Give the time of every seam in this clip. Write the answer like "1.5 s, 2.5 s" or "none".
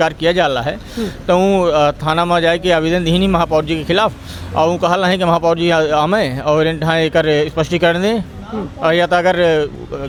none